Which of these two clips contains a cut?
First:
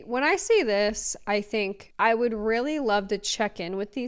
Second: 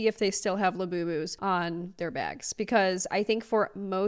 second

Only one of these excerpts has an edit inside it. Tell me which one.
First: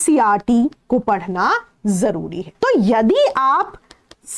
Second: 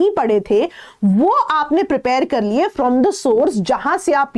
first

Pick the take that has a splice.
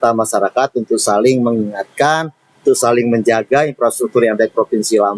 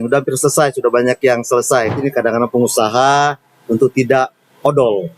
second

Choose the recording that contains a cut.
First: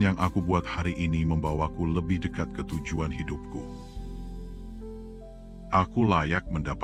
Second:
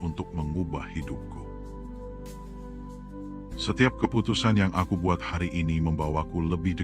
second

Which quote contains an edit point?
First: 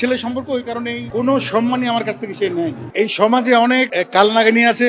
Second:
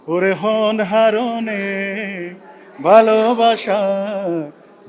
first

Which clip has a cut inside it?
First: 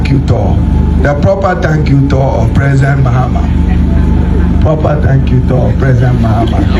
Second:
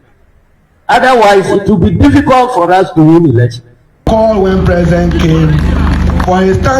second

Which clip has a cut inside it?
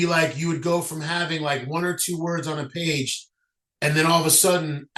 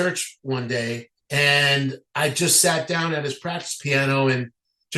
second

